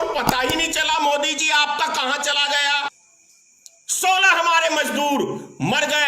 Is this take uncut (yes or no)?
no